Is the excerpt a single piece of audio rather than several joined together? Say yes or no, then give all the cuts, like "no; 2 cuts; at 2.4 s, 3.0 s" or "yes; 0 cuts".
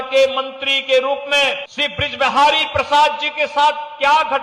no; 1 cut; at 1.7 s